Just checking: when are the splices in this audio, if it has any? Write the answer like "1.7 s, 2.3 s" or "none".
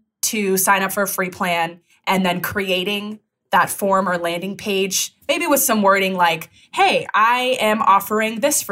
none